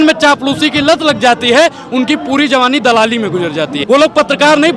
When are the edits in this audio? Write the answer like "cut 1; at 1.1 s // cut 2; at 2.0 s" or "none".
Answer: cut 1; at 3.8 s